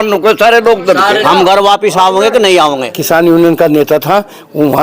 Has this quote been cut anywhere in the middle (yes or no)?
yes